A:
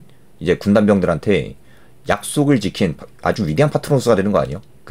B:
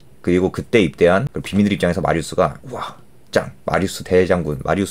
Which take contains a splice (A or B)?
B